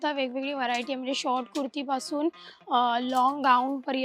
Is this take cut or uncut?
uncut